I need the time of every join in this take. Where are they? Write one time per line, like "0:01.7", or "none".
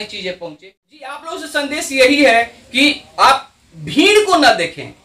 0:01.1